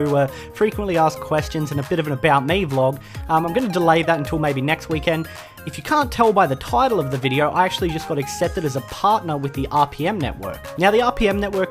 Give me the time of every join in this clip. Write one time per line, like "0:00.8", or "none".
0:10.0